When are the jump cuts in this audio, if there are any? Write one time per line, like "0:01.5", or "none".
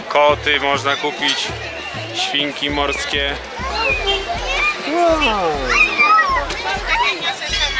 none